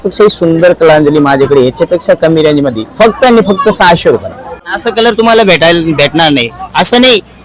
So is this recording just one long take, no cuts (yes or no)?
no